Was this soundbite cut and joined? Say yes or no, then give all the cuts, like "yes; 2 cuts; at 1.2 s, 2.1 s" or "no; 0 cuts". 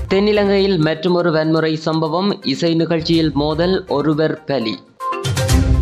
yes; 1 cut; at 4.9 s